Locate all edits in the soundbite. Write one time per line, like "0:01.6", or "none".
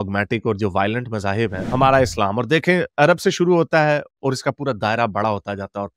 0:01.7